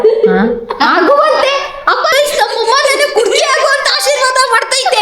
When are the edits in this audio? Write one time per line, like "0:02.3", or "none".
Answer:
0:02.1